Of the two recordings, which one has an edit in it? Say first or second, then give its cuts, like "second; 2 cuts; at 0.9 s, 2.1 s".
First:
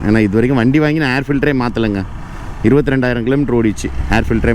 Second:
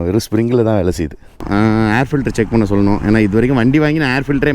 second; 1 cut; at 1.4 s